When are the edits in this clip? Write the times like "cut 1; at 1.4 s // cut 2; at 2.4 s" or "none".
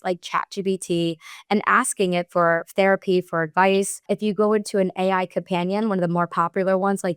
cut 1; at 4.0 s